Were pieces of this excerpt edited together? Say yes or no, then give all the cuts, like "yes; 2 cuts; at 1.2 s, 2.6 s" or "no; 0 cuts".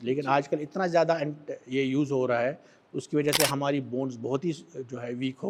no; 0 cuts